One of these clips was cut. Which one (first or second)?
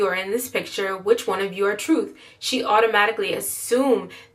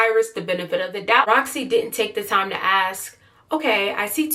second